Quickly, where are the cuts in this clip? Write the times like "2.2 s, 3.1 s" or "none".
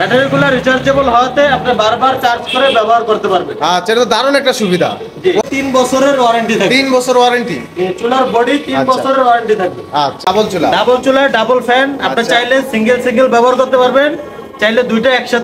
5.4 s, 10.3 s